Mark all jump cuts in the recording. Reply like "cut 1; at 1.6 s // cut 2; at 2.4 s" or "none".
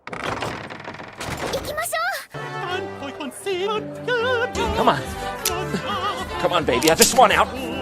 cut 1; at 3.7 s